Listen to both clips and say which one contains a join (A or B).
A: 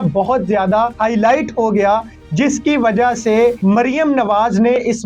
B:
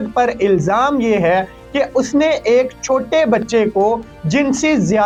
A